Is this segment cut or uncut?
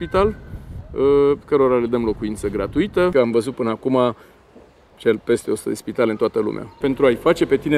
cut